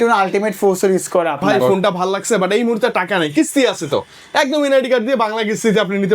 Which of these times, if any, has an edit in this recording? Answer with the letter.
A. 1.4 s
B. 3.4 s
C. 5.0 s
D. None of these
A